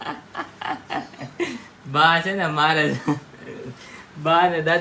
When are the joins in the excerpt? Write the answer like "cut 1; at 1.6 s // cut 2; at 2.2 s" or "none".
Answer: none